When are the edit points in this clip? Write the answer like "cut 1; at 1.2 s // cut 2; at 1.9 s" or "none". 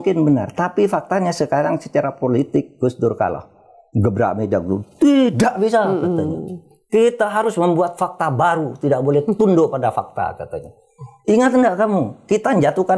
none